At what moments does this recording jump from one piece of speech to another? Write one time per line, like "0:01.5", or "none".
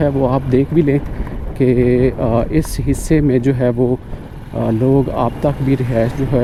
none

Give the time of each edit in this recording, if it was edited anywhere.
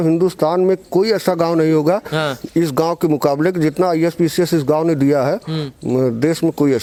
none

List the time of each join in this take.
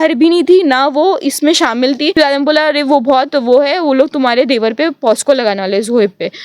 0:02.1

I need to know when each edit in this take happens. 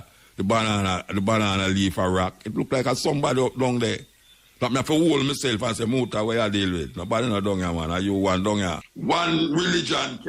0:08.9

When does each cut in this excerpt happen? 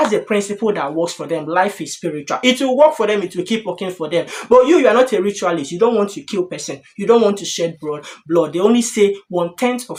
none

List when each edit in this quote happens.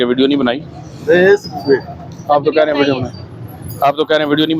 none

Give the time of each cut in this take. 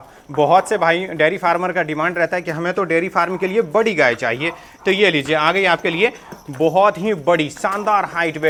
none

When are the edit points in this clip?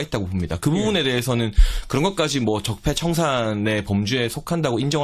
none

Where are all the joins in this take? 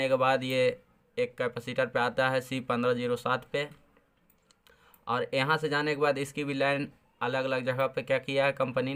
none

